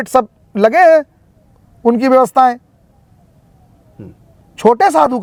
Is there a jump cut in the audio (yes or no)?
no